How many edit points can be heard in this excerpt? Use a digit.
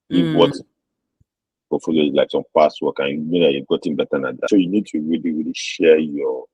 1